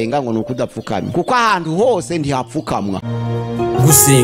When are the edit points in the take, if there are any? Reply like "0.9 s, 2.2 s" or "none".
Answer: 1.1 s, 3.1 s